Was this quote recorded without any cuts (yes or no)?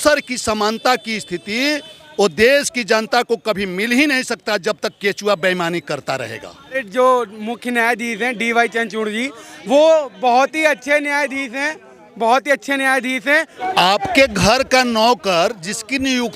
no